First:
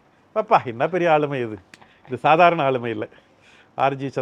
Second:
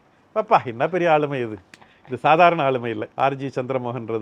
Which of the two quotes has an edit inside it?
second; 1 cut; at 3.1 s

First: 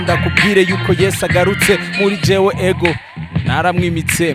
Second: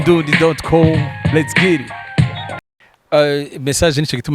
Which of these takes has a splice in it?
second; 1 cut; at 2.6 s

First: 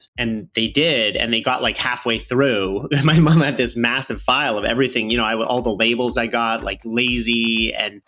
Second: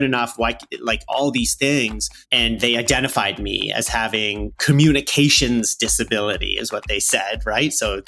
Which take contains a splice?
second; 1 cut; at 4.6 s

